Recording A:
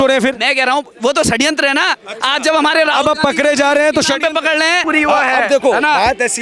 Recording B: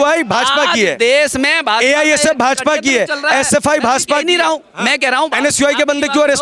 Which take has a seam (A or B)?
A